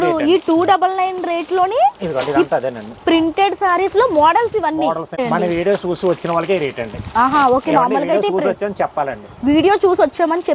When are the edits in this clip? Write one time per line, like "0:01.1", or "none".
0:05.2